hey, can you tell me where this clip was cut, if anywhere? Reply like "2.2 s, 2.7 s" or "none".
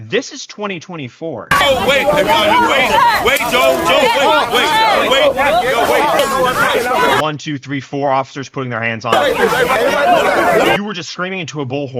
1.6 s, 6.2 s, 9.7 s